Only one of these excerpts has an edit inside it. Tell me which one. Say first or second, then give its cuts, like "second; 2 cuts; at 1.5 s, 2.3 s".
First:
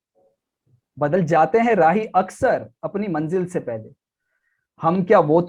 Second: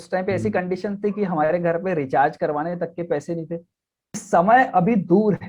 second; 1 cut; at 4.2 s